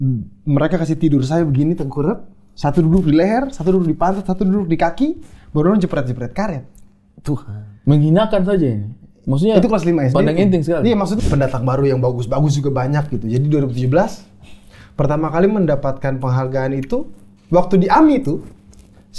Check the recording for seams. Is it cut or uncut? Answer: cut